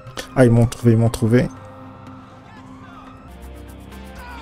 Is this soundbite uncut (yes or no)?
no